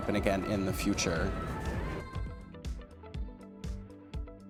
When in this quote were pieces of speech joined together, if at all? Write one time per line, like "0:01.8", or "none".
none

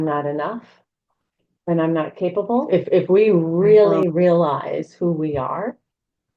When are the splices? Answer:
0:02.7

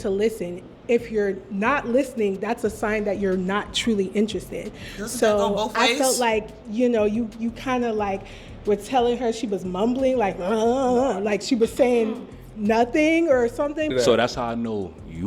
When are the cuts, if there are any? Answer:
0:13.9

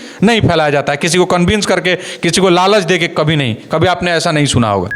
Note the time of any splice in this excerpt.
none

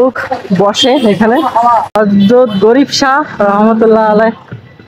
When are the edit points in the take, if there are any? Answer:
0:01.9

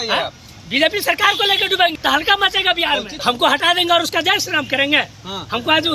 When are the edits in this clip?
0:02.0
0:03.2

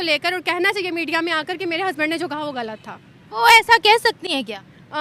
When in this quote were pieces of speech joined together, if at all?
none

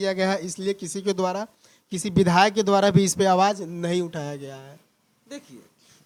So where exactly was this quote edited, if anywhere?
none

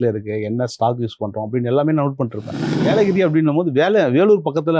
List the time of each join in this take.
0:02.8

